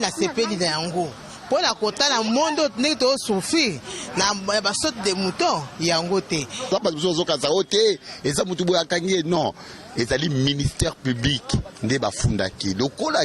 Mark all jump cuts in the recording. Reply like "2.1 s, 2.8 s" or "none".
6.7 s